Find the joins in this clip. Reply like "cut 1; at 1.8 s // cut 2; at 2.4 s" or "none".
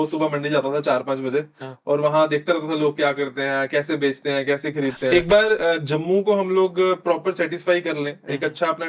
cut 1; at 5.1 s